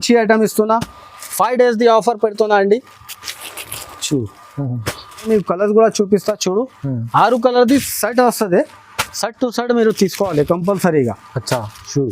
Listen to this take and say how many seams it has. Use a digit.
1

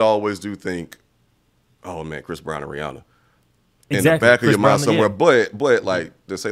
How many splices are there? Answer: 0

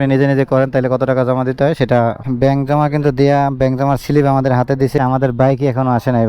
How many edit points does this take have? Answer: 2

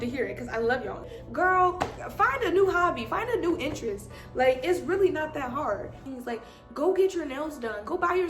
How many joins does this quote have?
2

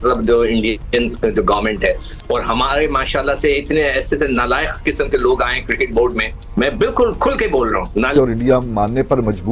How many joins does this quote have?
1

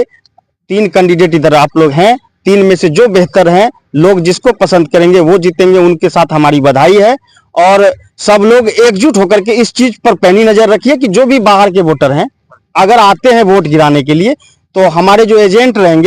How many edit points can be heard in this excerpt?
0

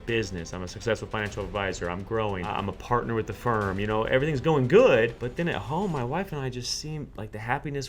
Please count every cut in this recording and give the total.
2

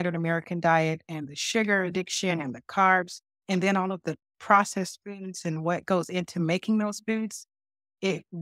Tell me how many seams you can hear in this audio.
0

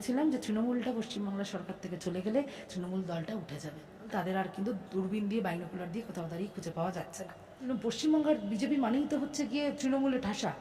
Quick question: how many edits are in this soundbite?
2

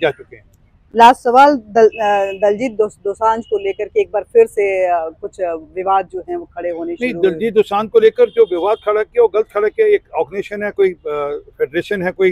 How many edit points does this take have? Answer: 0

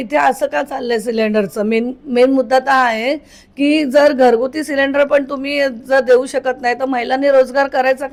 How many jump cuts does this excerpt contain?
0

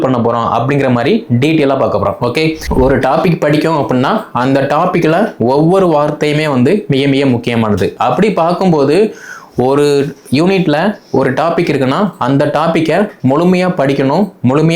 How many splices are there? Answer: 1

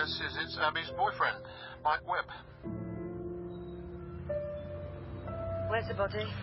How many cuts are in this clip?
0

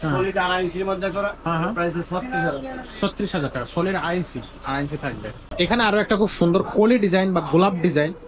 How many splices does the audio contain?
1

